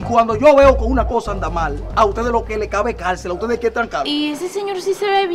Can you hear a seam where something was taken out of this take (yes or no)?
yes